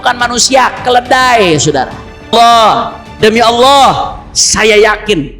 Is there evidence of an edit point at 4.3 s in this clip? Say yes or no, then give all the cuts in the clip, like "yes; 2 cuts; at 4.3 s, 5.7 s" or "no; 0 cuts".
no; 1 cut; at 2.3 s